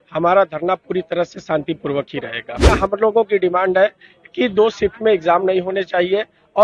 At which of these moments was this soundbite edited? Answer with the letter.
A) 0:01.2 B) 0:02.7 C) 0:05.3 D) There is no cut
B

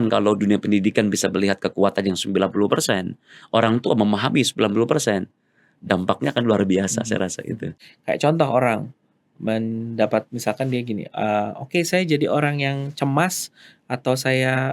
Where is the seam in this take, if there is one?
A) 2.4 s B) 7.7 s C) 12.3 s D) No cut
B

